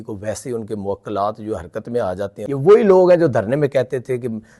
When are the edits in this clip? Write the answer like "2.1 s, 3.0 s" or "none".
2.4 s